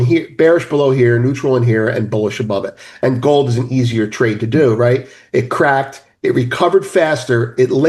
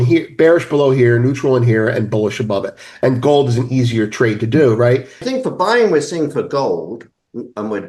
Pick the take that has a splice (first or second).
second